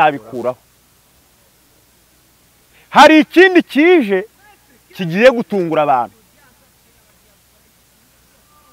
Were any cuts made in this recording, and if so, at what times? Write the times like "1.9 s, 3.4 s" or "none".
none